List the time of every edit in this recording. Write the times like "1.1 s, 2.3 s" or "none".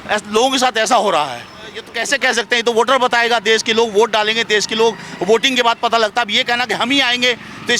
1.9 s